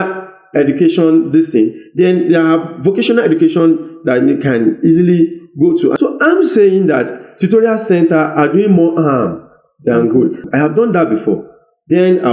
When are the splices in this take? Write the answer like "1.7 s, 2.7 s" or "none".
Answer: 5.9 s, 10.5 s